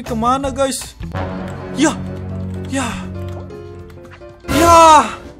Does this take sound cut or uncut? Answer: uncut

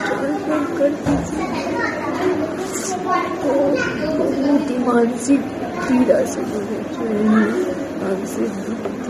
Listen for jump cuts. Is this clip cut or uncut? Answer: uncut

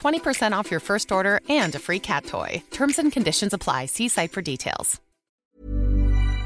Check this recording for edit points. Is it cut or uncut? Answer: cut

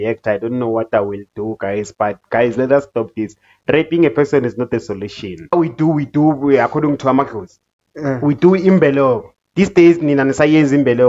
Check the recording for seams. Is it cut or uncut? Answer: cut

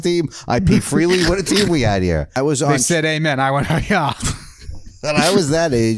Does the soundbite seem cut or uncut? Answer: cut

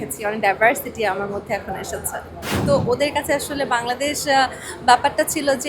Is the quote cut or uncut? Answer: cut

